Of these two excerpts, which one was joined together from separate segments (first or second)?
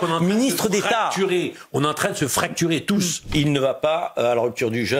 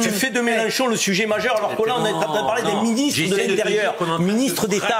first